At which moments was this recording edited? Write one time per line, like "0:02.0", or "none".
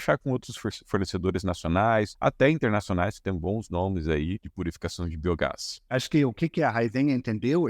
0:02.1
0:04.5
0:05.8